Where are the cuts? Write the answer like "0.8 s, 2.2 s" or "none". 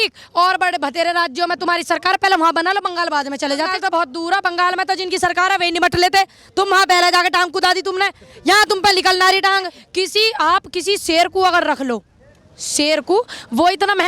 3.7 s, 9.8 s